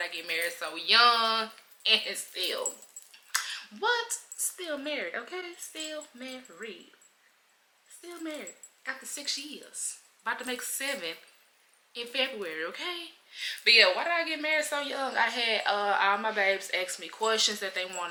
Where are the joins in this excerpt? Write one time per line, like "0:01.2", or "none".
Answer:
none